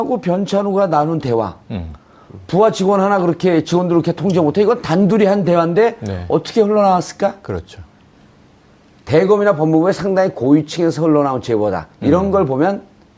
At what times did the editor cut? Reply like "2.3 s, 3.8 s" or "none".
none